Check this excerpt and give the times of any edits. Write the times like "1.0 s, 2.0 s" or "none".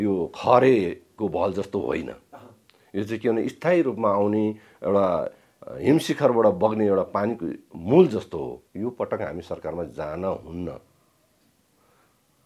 8.6 s